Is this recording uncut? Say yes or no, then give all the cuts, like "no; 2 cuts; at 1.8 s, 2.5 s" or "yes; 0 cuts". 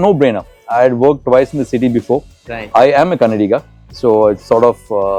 yes; 0 cuts